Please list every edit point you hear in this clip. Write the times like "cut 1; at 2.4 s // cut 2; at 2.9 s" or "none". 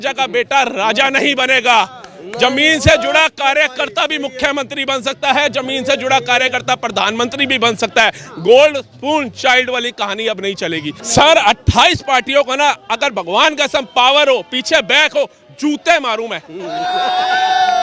cut 1; at 11.0 s